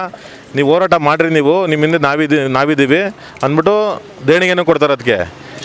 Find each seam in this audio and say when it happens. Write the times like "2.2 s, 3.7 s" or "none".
none